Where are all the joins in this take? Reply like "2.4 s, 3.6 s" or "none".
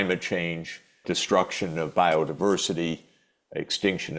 1.0 s